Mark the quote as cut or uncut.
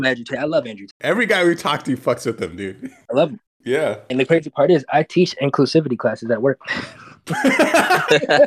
cut